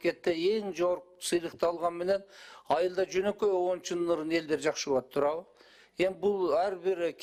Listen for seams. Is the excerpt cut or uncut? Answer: uncut